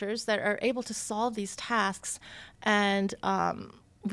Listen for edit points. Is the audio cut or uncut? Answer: uncut